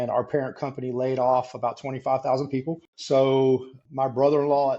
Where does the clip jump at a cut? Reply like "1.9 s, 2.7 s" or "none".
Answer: 2.9 s, 3.8 s